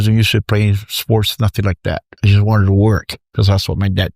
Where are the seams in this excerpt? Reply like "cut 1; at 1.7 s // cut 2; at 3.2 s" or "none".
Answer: cut 1; at 2.1 s // cut 2; at 3.2 s